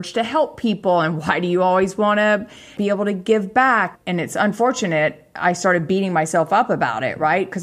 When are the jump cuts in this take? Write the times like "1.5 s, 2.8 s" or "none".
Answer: 2.7 s